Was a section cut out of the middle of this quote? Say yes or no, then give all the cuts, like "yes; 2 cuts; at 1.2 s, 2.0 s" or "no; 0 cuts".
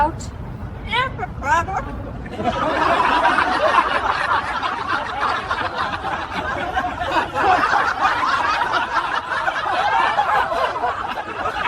no; 0 cuts